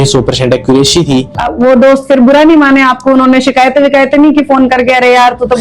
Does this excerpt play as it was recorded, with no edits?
no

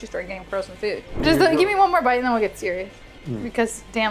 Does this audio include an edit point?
yes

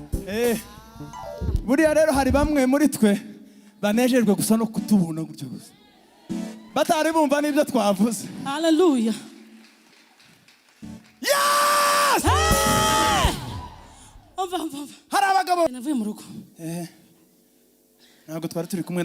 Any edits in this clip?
yes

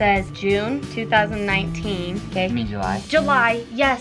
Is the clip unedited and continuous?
no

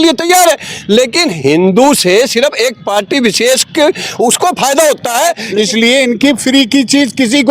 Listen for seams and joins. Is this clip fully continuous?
no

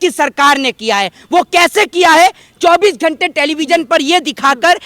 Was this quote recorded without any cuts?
yes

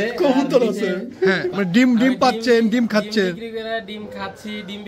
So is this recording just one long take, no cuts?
no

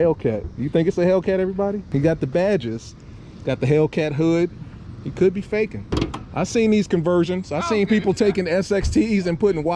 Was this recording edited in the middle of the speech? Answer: yes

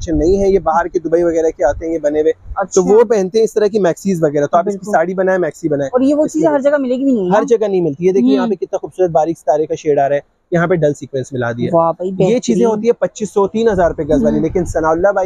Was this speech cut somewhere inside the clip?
no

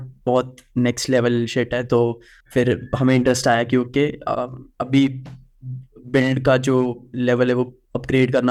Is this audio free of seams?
yes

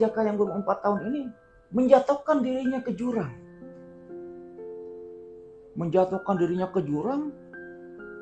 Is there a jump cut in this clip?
no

